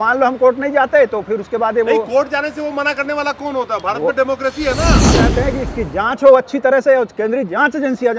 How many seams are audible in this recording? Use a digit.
1